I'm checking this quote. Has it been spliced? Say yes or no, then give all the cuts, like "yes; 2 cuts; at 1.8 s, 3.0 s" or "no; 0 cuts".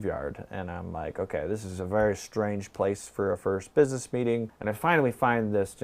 yes; 1 cut; at 4.5 s